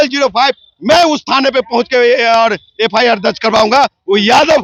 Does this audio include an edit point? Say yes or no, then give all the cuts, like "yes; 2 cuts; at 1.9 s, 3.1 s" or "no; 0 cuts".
no; 0 cuts